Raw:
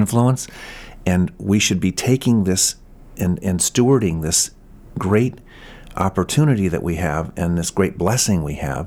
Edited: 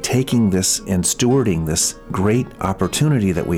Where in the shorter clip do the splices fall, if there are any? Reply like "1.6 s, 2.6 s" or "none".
0.8 s, 2.0 s, 2.5 s

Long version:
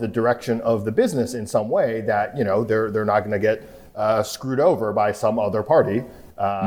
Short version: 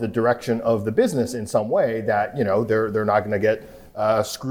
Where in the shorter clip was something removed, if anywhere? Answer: none

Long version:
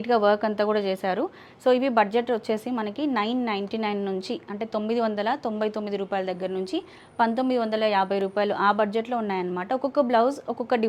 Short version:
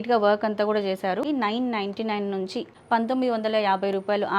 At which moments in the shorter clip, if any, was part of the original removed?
1.2 s, 2.7 s

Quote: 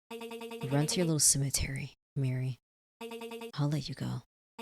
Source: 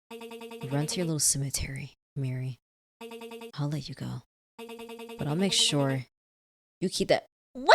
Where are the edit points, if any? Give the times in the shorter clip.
none

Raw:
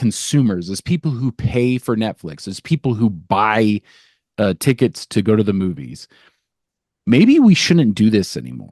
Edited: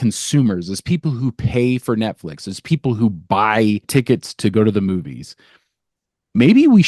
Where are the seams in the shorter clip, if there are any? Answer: 3.9 s

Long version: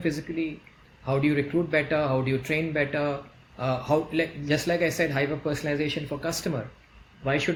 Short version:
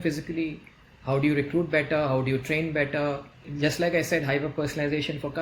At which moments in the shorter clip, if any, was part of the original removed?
3.5 s

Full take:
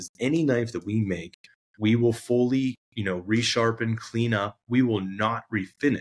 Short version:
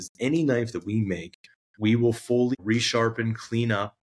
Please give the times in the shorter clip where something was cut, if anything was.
2.6 s

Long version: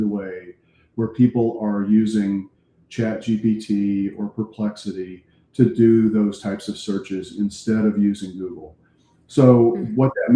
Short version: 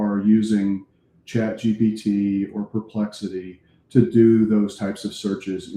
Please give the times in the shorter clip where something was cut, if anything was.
none

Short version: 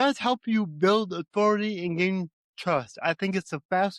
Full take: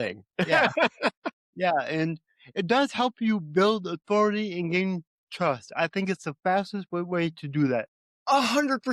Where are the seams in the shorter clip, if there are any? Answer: none

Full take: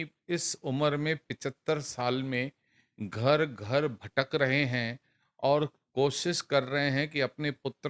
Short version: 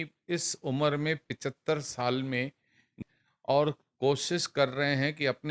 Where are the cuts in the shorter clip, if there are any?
3.0 s

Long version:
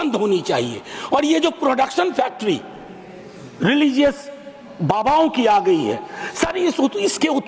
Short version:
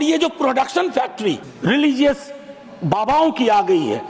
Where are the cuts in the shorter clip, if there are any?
1.5 s

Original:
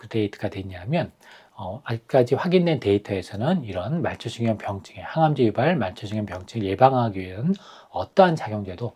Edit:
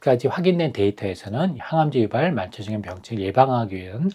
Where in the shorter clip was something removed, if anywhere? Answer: 1.6 s

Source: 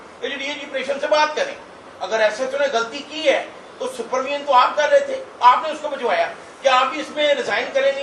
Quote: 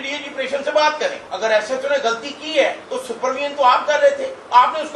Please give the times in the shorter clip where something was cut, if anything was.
1.3 s, 2.9 s

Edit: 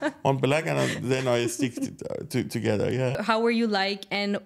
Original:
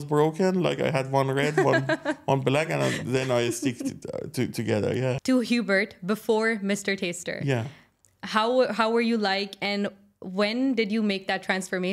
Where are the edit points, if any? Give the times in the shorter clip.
3.2 s

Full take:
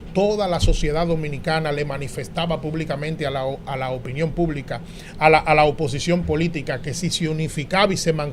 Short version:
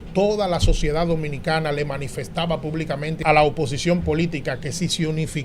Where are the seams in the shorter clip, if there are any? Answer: 3.2 s

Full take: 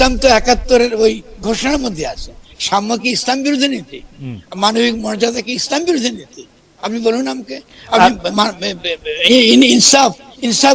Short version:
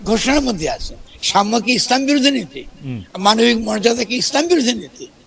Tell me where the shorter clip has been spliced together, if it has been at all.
none

